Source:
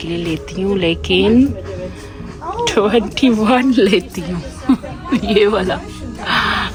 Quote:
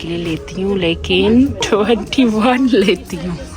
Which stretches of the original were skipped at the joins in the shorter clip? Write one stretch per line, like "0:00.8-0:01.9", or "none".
0:01.6-0:02.6